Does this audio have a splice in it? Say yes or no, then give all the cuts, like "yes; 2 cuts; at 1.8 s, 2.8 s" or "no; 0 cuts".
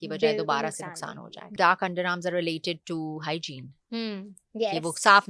yes; 1 cut; at 1.6 s